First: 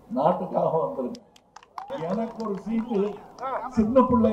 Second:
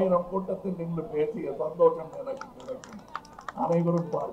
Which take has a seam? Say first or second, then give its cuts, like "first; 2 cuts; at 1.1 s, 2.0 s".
first; 1 cut; at 1.9 s